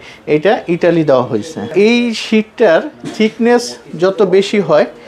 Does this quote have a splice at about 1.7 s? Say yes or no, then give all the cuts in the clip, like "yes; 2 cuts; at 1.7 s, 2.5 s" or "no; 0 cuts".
yes; 1 cut; at 1.7 s